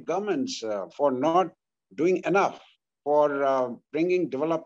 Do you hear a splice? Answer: no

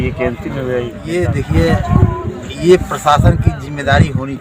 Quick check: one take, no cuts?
no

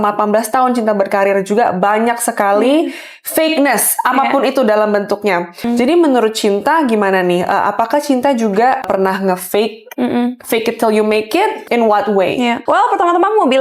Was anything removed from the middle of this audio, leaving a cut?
yes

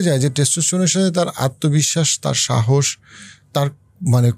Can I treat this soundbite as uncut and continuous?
yes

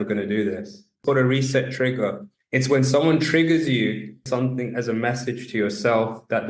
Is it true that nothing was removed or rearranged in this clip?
no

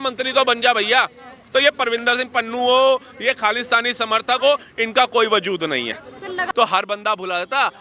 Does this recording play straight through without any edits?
no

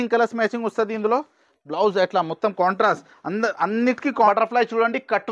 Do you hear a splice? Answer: yes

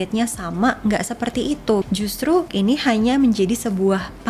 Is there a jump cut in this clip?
yes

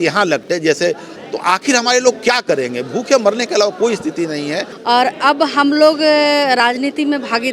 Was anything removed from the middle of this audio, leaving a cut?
yes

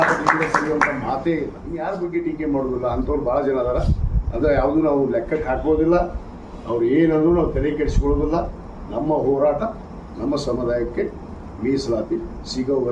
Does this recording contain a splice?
yes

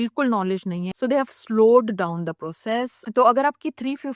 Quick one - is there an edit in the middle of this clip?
yes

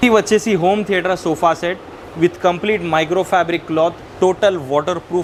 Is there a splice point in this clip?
no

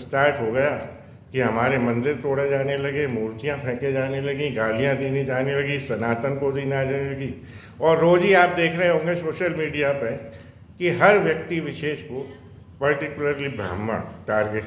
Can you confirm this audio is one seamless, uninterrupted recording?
yes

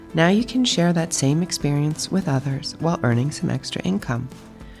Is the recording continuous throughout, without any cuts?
yes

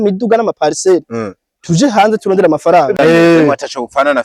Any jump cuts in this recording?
yes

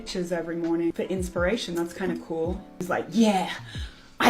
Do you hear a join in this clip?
yes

